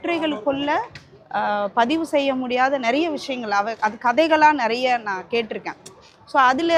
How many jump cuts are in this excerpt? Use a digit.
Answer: 0